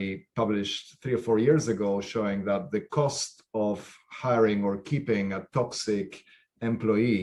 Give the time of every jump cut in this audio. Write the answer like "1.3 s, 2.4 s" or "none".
none